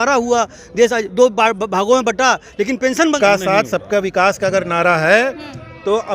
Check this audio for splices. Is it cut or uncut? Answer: cut